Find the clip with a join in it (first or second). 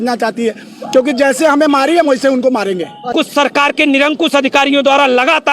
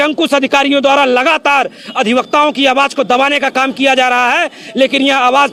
first